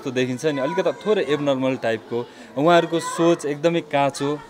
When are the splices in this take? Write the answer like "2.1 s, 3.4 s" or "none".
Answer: none